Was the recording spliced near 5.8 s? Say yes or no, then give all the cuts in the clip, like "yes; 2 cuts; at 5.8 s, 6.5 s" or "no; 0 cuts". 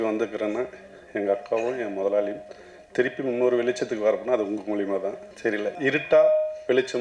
yes; 1 cut; at 5.8 s